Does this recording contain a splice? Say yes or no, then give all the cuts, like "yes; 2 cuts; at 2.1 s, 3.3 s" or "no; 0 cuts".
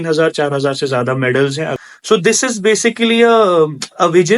yes; 1 cut; at 1.8 s